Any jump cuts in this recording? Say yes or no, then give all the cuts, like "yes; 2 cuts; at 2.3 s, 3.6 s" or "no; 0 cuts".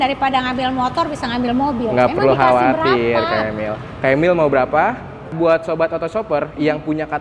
yes; 1 cut; at 5.3 s